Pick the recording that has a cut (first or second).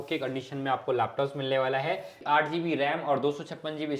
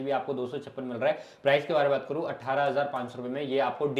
first